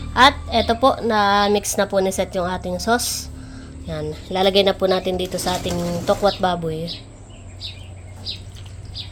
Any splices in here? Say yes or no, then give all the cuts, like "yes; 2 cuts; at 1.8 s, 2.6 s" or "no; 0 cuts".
no; 0 cuts